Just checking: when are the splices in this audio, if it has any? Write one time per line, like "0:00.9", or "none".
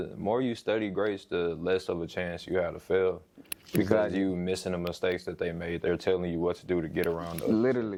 none